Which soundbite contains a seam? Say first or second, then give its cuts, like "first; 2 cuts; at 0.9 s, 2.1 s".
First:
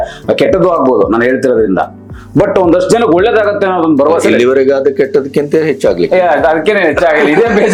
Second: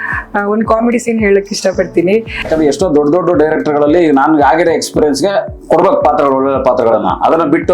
second; 1 cut; at 2.5 s